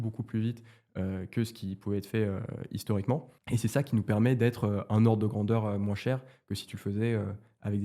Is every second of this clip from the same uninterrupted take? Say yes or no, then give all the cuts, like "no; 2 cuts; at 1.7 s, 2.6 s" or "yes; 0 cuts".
no; 1 cut; at 3.3 s